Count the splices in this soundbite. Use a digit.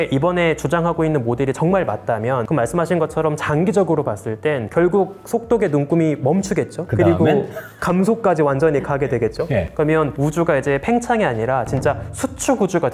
0